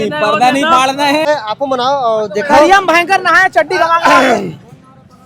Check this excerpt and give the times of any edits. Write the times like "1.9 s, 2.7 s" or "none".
1.3 s